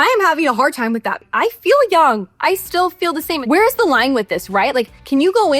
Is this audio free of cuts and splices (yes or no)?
no